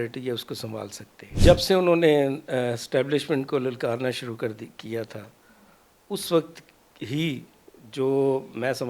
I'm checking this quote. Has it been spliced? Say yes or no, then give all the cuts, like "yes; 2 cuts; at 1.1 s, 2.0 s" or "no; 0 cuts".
yes; 1 cut; at 1.4 s